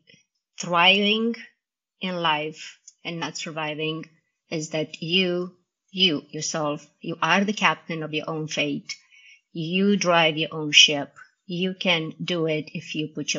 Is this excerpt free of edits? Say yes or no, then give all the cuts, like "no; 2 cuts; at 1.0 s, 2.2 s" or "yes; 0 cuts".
yes; 0 cuts